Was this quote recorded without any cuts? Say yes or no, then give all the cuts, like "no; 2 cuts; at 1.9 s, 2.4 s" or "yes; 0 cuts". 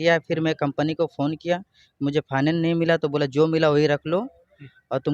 yes; 0 cuts